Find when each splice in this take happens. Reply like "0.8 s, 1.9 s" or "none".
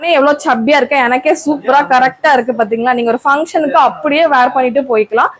none